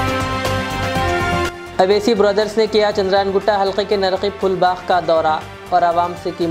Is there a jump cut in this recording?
yes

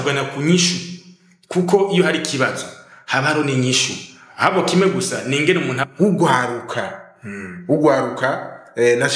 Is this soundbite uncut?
no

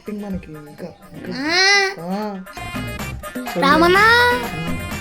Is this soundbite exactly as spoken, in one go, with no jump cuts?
no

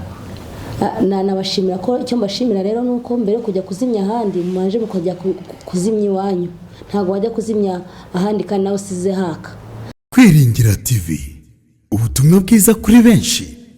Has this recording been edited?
yes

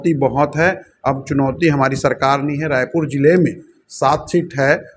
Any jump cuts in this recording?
no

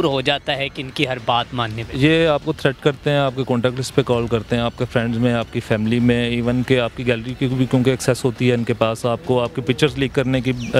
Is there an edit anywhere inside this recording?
no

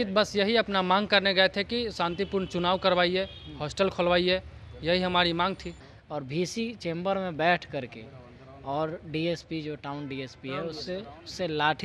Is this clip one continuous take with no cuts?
no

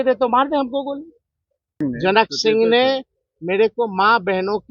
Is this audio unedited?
no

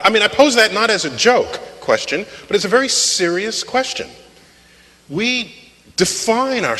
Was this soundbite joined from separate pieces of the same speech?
yes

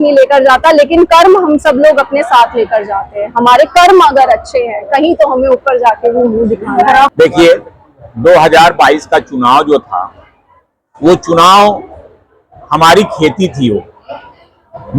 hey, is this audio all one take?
no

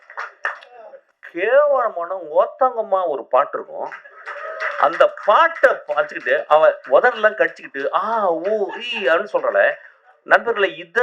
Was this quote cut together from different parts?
yes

